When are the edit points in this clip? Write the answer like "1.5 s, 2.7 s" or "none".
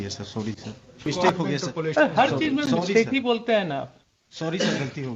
1.1 s